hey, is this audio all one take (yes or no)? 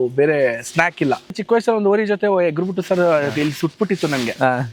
no